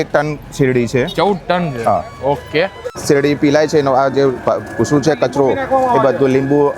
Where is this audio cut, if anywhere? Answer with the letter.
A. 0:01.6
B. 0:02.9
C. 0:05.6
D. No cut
B